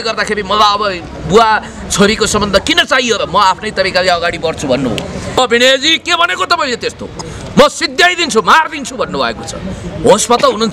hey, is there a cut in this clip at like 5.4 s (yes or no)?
yes